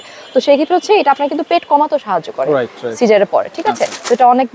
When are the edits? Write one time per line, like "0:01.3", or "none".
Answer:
none